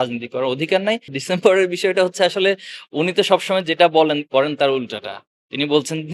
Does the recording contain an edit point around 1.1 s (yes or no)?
yes